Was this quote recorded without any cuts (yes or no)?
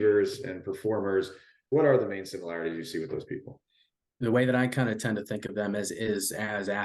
yes